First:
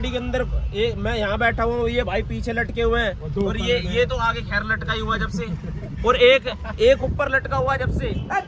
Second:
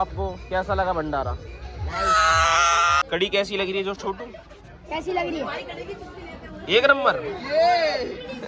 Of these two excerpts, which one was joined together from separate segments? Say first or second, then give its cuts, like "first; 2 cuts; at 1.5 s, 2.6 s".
second; 1 cut; at 3.0 s